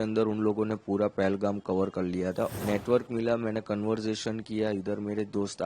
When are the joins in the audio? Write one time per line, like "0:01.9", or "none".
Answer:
0:02.5

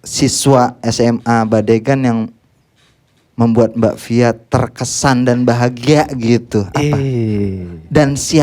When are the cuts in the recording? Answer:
none

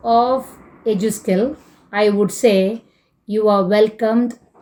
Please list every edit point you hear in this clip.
none

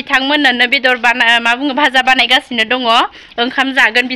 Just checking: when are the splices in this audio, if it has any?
none

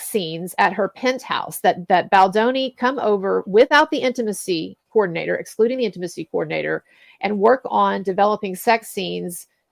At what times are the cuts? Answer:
none

